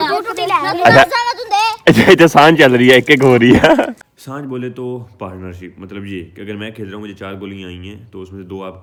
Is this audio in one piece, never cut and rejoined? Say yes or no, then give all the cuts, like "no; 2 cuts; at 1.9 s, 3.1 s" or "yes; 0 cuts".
yes; 0 cuts